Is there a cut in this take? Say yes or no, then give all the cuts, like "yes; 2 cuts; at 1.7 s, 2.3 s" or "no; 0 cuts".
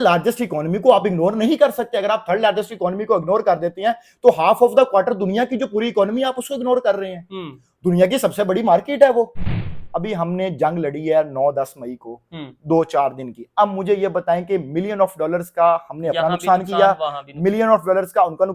yes; 1 cut; at 9.6 s